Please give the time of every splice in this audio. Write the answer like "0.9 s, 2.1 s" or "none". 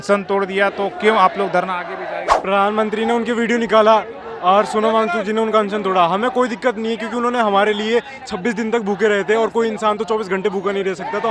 2.3 s